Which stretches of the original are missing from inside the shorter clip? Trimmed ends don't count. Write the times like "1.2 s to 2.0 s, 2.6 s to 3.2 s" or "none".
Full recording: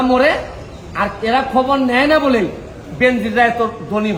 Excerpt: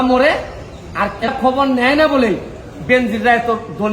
1.3 s to 1.4 s